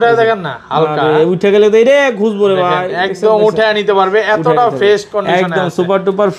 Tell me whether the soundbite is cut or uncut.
uncut